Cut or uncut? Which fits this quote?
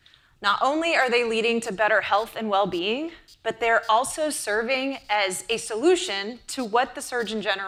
uncut